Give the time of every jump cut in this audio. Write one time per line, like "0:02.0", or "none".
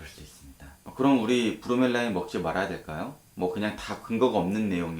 none